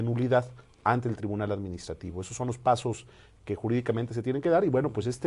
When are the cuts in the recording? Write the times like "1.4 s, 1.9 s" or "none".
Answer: none